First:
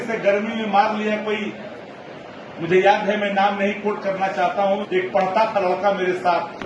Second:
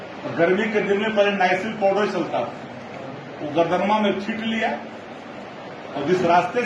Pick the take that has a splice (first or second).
first